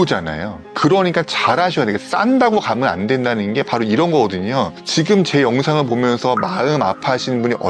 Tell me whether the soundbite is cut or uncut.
uncut